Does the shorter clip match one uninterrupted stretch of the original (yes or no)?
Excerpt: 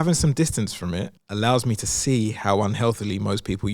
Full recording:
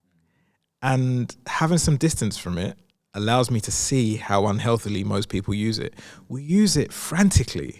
no